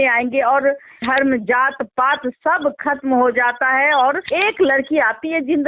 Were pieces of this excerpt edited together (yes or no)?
yes